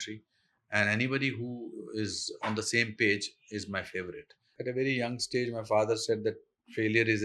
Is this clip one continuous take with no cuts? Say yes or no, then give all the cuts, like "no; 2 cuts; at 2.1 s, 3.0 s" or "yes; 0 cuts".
no; 1 cut; at 4.5 s